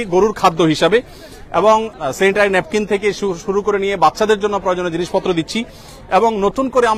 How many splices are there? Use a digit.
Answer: 0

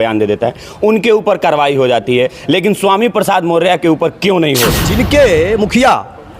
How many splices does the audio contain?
1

